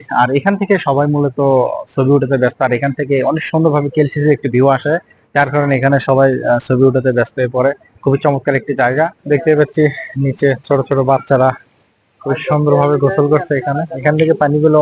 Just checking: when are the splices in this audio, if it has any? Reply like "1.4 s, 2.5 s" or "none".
9.2 s, 14.0 s